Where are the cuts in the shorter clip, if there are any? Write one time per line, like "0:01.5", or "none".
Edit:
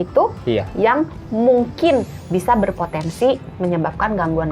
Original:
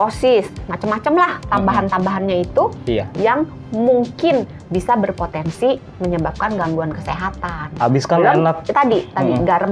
none